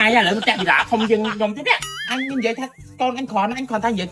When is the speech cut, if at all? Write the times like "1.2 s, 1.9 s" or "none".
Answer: none